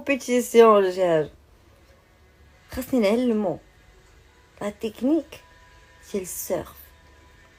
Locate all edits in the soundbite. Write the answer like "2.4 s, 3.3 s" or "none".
none